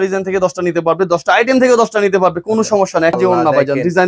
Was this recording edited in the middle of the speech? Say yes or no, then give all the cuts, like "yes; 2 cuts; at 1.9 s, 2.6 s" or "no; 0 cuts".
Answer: yes; 1 cut; at 3.2 s